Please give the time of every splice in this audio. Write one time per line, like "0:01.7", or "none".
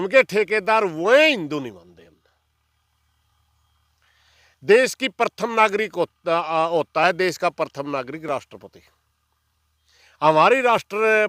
none